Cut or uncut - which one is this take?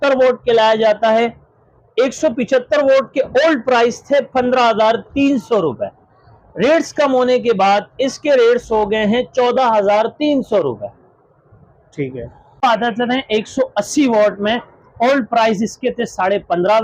uncut